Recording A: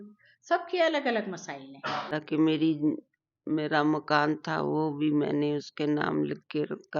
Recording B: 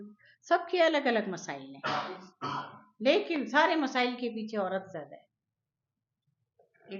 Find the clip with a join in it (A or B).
A